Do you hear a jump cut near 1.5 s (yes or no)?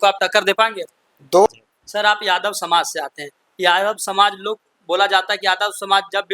yes